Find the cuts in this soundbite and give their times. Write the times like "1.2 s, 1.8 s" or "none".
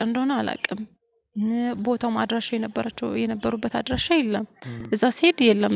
none